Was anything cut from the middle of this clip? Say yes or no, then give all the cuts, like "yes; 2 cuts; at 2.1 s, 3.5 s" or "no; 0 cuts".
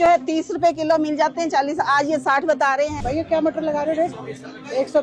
yes; 1 cut; at 2.9 s